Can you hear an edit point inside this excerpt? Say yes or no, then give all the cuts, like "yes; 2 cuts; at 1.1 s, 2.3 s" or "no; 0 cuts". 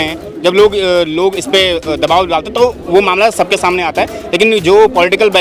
no; 0 cuts